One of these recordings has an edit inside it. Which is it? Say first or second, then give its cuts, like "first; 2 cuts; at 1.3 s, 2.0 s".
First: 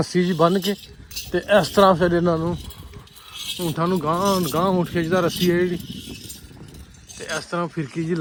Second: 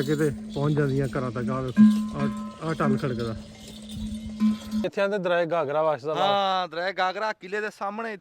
second; 1 cut; at 4.9 s